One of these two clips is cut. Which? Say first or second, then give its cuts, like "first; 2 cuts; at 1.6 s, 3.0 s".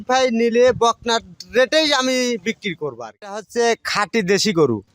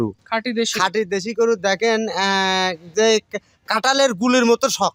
first; 1 cut; at 3.3 s